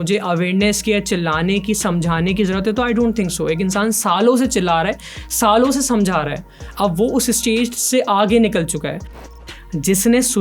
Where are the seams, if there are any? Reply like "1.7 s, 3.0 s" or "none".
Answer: 9.2 s